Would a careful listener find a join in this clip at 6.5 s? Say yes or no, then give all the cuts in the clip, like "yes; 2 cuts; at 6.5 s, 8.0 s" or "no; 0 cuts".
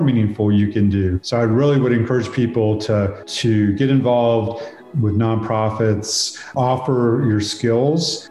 yes; 1 cut; at 6.5 s